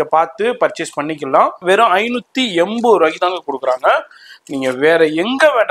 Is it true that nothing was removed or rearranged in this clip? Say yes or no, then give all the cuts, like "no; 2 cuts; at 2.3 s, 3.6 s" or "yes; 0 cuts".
no; 1 cut; at 1.6 s